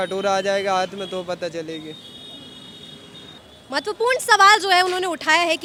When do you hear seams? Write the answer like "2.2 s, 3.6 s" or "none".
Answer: none